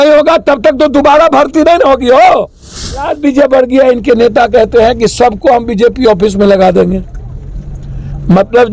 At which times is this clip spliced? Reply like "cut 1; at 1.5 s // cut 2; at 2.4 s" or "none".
cut 1; at 3.1 s